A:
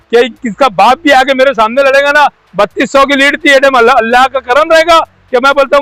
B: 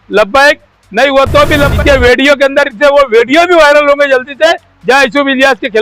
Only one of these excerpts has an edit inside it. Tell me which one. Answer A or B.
B